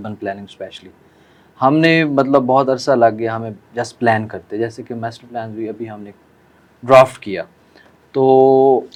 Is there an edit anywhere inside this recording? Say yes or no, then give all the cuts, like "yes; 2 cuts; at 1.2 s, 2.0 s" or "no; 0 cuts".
no; 0 cuts